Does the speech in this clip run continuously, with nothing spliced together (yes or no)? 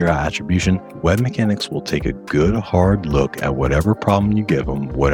yes